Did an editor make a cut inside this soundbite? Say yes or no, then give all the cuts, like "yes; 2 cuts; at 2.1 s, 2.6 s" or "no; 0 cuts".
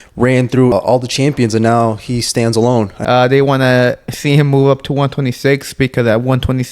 yes; 2 cuts; at 0.7 s, 3.0 s